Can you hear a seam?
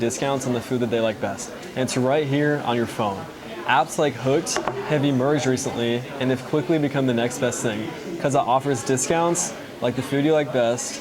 no; 0 cuts

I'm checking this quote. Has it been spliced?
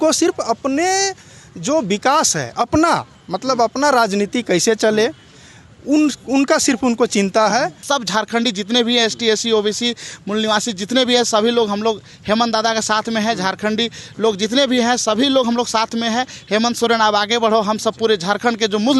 yes; 1 cut; at 7.8 s

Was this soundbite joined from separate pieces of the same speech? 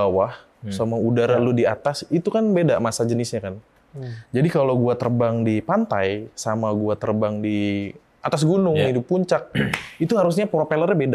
no; 0 cuts

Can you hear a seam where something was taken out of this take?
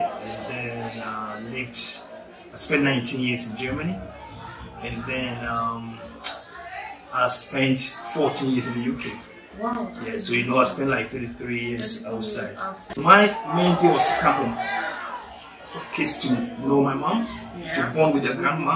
yes; 1 cut; at 13.0 s

